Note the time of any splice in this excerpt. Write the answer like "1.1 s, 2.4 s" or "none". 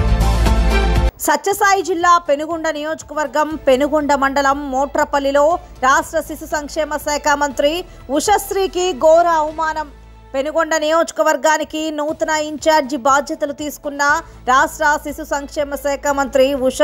1.1 s

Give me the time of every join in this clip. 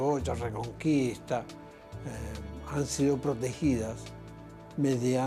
3.4 s

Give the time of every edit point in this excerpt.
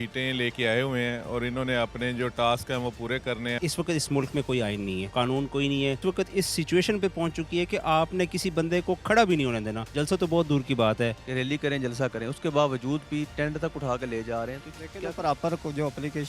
3.6 s, 5.0 s, 6.0 s, 9.8 s, 11.2 s

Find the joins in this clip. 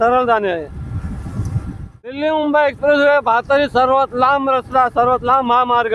1.9 s

